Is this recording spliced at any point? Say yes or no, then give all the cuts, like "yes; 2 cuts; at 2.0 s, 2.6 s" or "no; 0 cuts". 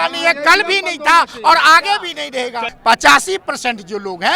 yes; 1 cut; at 2.7 s